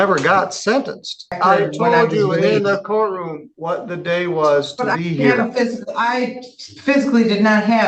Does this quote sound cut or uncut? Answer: cut